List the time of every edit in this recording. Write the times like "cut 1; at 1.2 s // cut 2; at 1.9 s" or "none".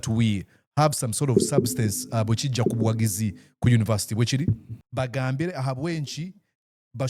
cut 1; at 4.7 s